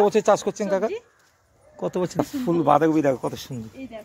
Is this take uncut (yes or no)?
no